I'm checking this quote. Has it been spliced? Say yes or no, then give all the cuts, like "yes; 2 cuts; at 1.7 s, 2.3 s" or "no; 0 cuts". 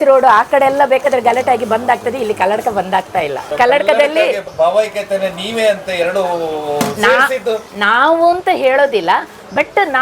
yes; 2 cuts; at 3.4 s, 4.4 s